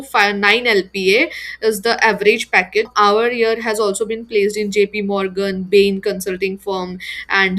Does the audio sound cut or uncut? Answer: cut